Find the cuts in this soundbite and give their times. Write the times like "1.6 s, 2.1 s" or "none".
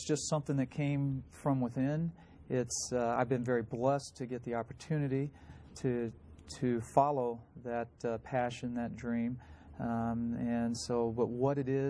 4.1 s